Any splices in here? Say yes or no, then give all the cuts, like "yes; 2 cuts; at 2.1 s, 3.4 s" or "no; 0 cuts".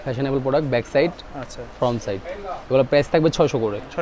no; 0 cuts